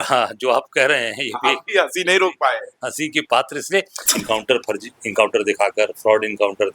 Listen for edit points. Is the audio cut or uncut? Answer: cut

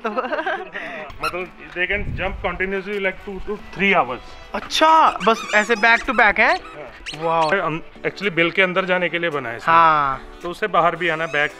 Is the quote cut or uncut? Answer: cut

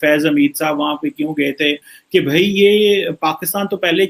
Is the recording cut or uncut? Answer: cut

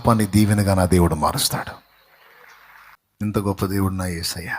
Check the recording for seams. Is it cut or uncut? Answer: cut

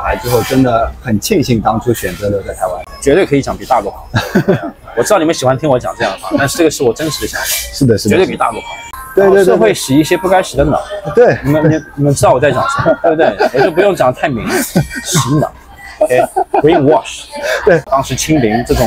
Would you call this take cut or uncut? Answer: cut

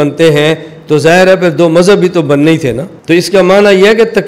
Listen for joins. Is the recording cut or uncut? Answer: cut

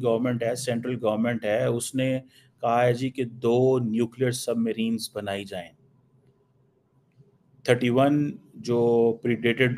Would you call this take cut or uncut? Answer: uncut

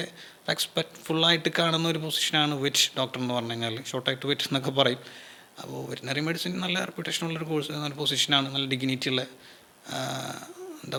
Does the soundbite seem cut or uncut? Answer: uncut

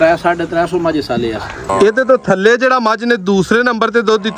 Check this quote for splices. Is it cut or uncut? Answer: cut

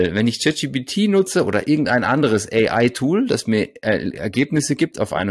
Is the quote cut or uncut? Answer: uncut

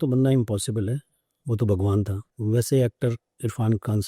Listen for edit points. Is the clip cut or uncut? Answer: cut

